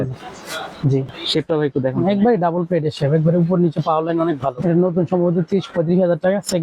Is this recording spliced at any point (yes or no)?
yes